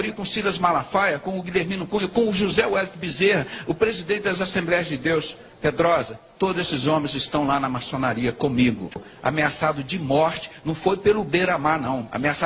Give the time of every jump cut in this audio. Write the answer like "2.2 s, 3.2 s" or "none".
9.0 s